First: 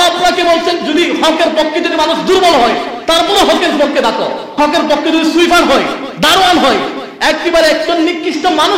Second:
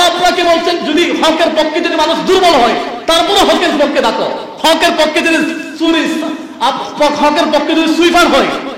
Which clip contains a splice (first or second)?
first